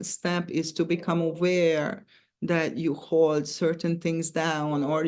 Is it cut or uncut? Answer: uncut